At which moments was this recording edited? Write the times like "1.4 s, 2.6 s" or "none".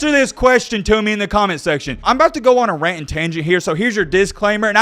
1.9 s